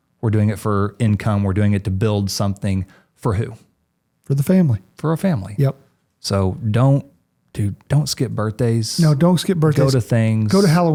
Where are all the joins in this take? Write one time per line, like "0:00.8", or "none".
none